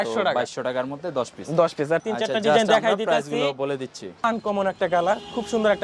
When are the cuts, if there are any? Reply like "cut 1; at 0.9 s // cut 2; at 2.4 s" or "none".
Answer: cut 1; at 2.0 s // cut 2; at 4.2 s